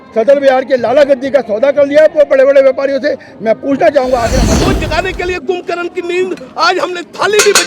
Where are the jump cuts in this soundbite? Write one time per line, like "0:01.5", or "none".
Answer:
0:04.5